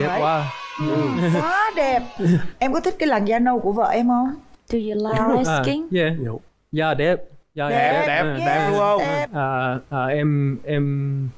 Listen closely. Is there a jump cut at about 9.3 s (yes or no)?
yes